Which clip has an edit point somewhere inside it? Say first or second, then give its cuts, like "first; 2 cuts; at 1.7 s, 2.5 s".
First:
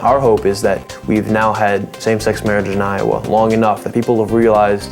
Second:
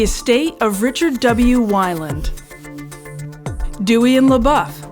first; 1 cut; at 0.9 s